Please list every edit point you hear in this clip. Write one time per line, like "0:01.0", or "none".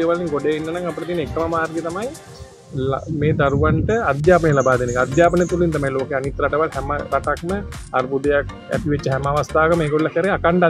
none